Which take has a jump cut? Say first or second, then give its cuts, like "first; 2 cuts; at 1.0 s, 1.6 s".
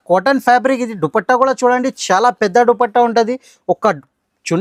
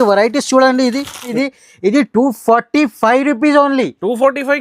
second; 1 cut; at 1.3 s